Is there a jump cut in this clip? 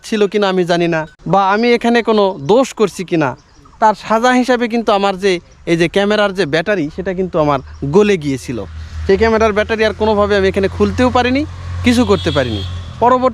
yes; 1 cut; at 1.1 s

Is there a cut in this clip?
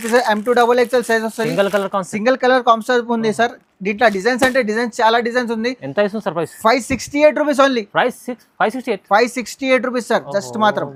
no; 0 cuts

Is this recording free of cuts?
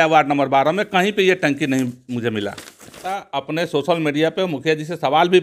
no; 1 cut; at 3.2 s

